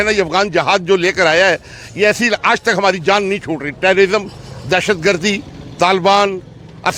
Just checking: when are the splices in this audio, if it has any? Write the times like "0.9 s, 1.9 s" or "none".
none